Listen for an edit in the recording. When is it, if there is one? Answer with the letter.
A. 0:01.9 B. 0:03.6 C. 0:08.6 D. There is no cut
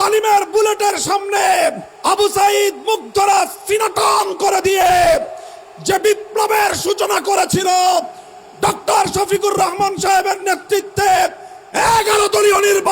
A